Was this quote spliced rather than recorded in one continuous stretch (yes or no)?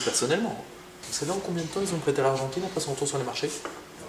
yes